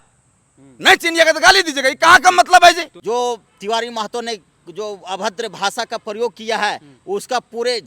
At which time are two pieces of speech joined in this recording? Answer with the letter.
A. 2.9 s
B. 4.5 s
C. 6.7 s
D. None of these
A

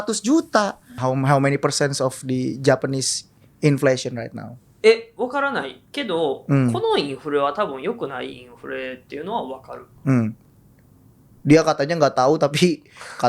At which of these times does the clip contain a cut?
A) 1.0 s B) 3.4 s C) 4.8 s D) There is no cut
A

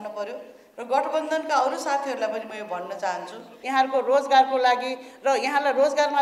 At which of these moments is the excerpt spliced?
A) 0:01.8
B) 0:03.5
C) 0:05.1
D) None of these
B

